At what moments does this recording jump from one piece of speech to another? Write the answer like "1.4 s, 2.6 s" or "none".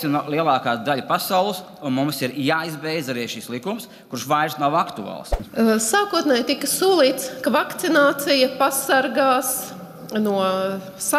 5.3 s